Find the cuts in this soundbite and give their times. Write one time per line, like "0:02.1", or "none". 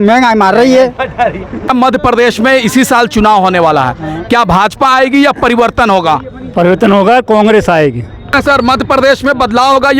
0:01.7
0:08.3